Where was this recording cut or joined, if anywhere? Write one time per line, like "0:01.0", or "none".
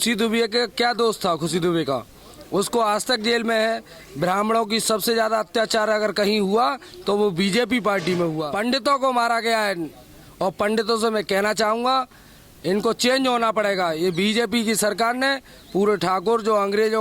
0:08.5